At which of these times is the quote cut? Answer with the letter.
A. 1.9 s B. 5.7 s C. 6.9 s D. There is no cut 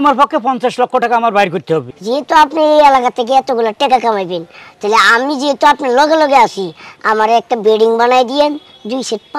A